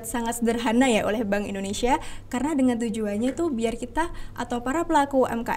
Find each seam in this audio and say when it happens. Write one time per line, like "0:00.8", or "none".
none